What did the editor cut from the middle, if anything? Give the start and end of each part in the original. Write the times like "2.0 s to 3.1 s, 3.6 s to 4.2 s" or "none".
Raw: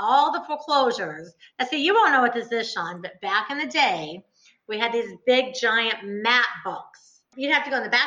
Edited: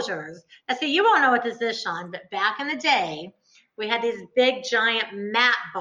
none